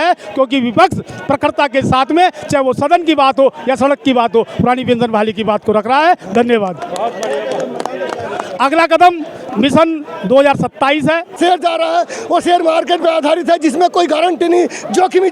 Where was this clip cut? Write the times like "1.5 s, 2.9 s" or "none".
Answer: 11.4 s